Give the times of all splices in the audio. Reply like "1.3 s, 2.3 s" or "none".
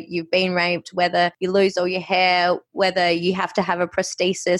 none